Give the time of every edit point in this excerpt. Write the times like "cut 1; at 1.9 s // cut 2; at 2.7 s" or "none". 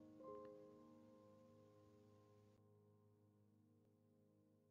none